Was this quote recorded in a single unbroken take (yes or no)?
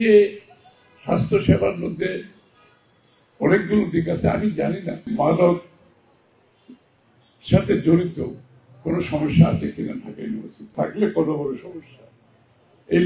no